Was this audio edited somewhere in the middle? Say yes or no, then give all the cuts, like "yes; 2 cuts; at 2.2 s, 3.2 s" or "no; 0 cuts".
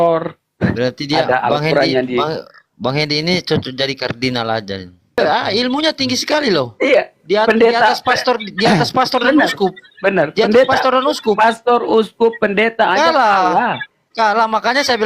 yes; 1 cut; at 5.2 s